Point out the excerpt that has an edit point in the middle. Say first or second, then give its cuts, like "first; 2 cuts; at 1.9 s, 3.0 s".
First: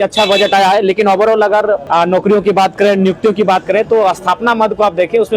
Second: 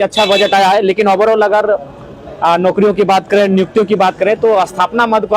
first; 1 cut; at 1.8 s